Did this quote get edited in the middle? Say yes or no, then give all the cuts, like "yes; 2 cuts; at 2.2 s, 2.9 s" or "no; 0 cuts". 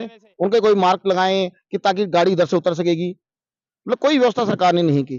no; 0 cuts